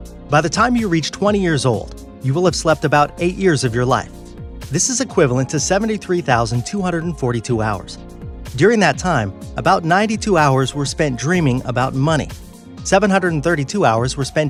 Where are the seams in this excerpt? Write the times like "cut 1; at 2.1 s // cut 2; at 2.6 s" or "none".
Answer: none